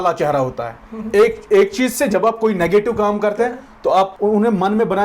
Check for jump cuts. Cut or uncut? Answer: cut